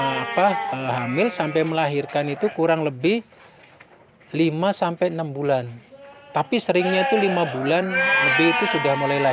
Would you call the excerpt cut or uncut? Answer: uncut